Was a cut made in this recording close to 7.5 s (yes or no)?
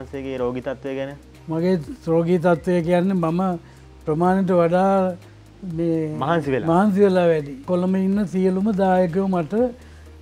yes